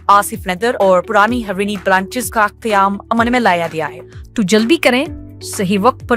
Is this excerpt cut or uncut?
cut